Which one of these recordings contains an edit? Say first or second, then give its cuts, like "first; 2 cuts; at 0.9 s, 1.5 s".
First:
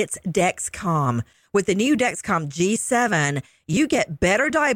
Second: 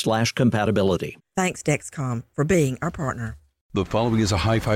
second; 1 cut; at 3.7 s